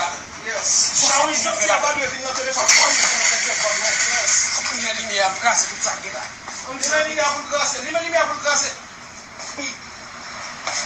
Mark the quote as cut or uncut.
cut